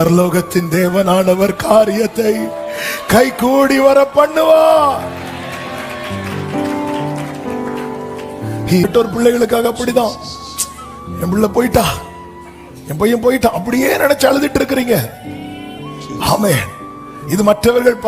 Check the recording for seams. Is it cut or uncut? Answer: cut